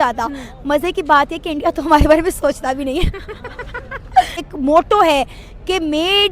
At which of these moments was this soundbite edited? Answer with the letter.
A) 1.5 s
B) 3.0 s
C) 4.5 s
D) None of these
C